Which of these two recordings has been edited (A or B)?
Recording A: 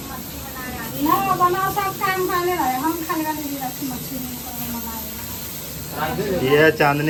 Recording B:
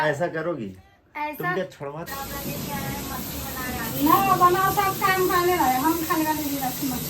B